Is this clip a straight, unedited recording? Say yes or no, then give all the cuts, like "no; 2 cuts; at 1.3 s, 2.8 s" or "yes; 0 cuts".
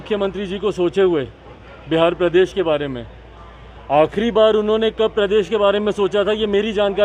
yes; 0 cuts